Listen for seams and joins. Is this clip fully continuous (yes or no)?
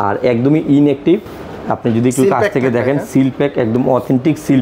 yes